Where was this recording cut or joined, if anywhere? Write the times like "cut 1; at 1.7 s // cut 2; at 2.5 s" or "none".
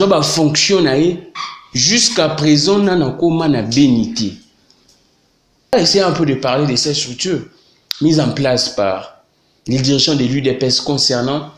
cut 1; at 5.7 s